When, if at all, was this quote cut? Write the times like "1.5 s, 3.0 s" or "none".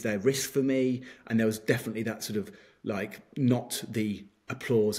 none